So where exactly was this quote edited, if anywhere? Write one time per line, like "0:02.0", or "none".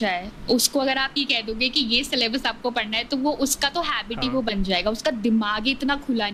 none

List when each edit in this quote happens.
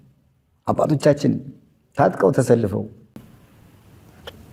none

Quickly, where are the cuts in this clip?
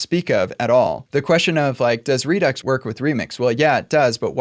0:01.0
0:02.6

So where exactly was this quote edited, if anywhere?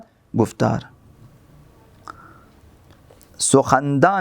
0:03.3

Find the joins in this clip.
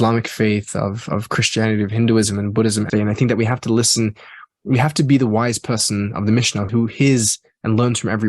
0:02.9
0:06.7

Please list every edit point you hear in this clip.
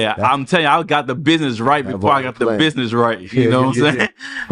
none

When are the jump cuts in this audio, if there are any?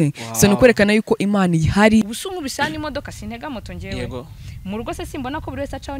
0:02.1

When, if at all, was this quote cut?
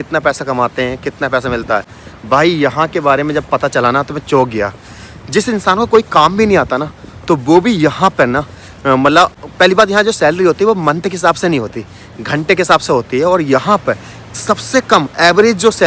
none

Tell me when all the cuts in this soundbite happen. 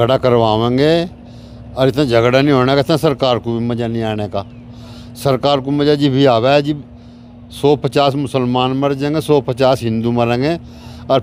none

